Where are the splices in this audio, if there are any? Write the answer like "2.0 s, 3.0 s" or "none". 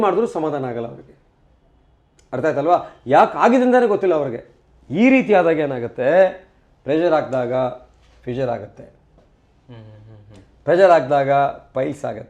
none